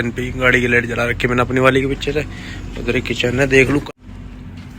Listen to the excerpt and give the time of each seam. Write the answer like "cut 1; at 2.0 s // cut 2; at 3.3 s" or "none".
cut 1; at 3.8 s

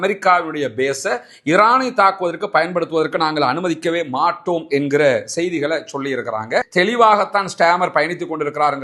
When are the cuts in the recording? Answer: cut 1; at 6.7 s

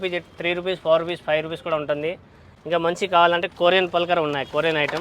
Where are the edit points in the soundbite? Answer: none

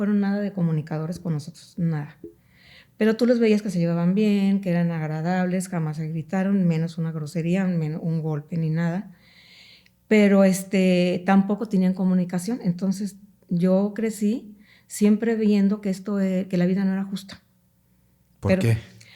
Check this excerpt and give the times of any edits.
none

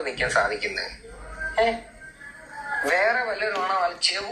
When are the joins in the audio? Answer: none

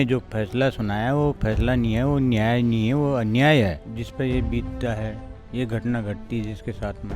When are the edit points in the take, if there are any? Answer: cut 1; at 3.9 s

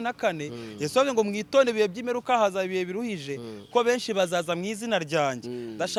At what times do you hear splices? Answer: none

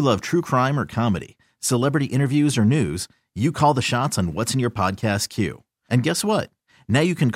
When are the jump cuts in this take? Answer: none

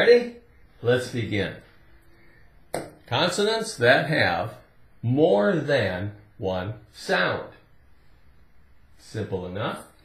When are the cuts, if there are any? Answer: cut 1; at 1.0 s

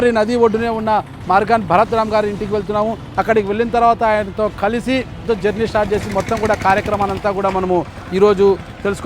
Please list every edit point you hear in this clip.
cut 1; at 5.2 s

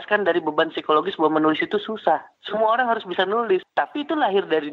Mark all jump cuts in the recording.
cut 1; at 3.7 s

